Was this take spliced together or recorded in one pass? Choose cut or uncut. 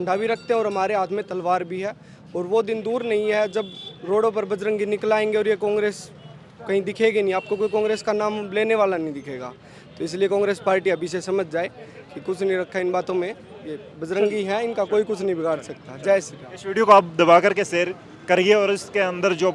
uncut